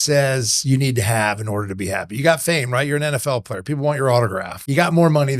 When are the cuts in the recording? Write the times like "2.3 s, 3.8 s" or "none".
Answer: 4.5 s